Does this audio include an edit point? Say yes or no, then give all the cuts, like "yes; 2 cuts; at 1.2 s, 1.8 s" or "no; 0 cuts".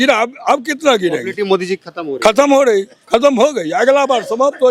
no; 0 cuts